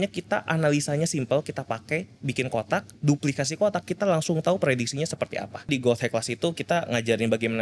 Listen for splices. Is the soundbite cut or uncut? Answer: cut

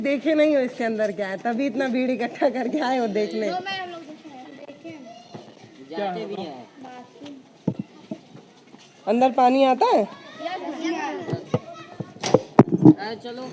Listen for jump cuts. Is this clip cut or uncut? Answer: uncut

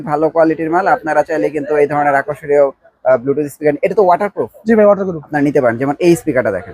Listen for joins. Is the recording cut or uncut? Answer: cut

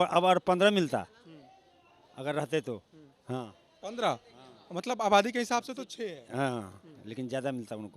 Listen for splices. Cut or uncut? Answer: uncut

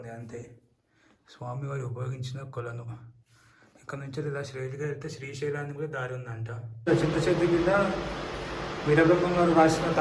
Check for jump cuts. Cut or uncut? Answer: cut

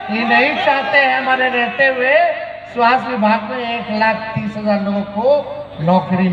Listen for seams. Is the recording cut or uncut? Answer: uncut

